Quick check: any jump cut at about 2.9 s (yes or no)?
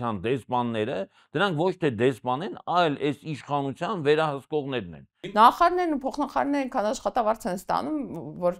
no